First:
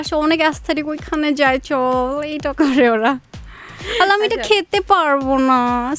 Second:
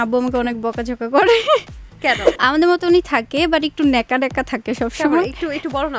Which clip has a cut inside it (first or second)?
second